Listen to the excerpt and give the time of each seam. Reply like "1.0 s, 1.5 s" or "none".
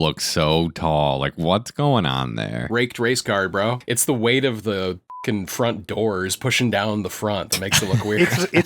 2.6 s, 3.9 s, 5.0 s